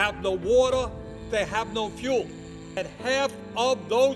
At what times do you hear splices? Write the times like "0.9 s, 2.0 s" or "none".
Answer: 2.8 s